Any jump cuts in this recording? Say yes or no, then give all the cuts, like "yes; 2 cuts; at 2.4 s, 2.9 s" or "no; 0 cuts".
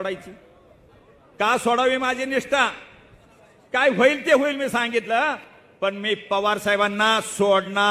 no; 0 cuts